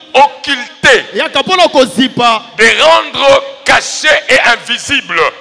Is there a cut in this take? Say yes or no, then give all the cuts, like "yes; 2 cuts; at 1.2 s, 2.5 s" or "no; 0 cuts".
no; 0 cuts